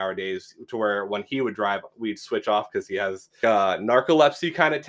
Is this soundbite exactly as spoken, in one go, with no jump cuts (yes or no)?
yes